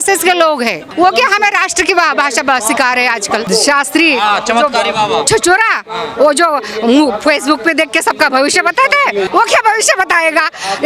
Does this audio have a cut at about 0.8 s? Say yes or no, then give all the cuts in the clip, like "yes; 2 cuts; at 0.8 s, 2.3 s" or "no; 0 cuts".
yes; 2 cuts; at 0.8 s, 3.4 s